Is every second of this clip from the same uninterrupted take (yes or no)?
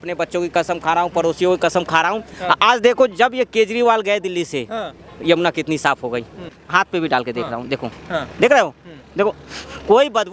no